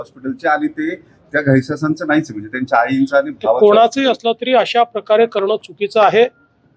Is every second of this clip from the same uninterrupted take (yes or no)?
yes